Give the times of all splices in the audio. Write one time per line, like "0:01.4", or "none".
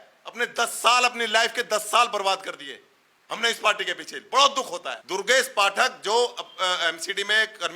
0:04.9